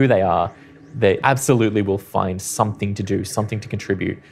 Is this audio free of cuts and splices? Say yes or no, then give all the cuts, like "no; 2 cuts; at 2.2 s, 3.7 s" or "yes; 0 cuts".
no; 1 cut; at 1.2 s